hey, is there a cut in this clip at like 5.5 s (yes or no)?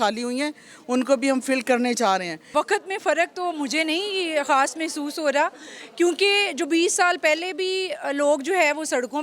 no